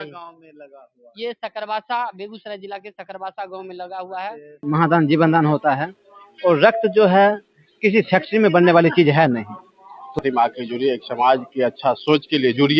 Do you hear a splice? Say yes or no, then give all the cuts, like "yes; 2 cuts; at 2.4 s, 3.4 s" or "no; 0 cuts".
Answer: yes; 2 cuts; at 4.6 s, 10.2 s